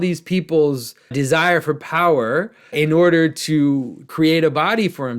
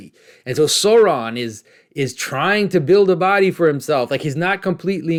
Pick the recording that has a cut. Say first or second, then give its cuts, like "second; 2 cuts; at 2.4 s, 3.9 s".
first; 3 cuts; at 1.1 s, 2.7 s, 4.0 s